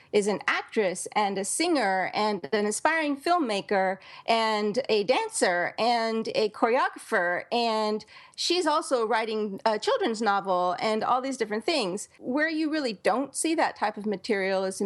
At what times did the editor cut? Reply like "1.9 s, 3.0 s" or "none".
12.1 s